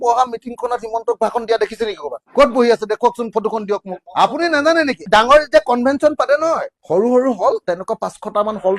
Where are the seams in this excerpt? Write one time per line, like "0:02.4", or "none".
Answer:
0:04.0
0:06.7